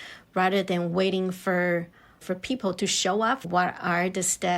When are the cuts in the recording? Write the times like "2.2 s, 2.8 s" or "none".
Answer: 3.5 s